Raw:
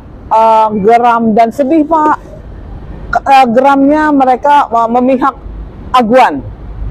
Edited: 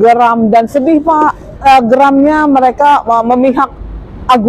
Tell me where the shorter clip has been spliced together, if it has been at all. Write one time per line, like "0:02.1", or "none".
0:01.5